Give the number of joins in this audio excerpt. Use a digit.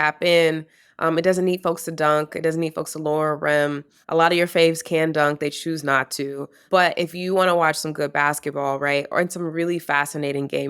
2